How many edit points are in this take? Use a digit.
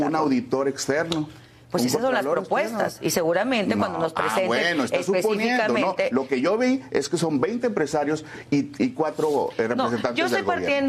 0